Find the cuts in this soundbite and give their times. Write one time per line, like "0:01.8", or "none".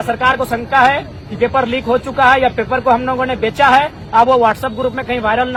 none